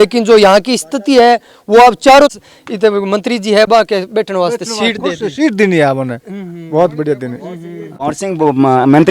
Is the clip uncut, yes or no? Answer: no